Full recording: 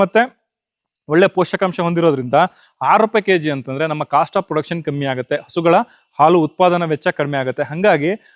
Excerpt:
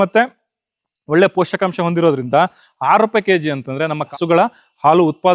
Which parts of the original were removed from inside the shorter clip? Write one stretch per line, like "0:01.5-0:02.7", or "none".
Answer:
0:04.1-0:05.4